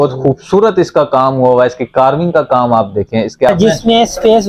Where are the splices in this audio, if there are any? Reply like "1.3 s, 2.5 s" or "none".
3.5 s